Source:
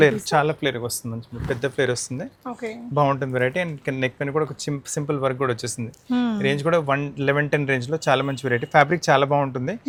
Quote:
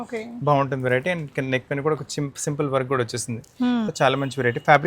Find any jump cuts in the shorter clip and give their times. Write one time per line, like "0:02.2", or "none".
0:03.9